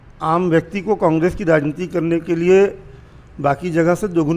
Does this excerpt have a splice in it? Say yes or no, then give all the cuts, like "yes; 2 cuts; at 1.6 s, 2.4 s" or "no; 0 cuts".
no; 0 cuts